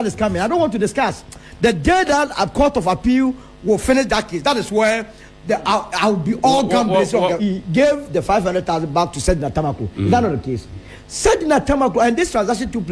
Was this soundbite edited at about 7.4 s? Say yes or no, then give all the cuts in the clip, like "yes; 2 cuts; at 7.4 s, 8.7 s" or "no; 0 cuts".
yes; 1 cut; at 7.4 s